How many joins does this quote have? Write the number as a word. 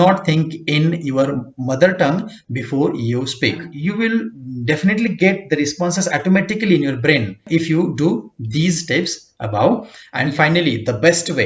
three